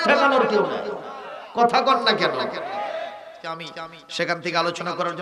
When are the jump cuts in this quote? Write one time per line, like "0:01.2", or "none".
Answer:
0:03.7